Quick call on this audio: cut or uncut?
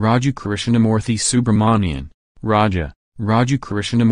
uncut